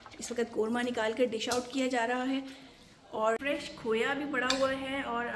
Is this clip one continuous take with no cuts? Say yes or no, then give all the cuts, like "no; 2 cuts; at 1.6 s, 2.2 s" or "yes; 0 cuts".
no; 1 cut; at 3.4 s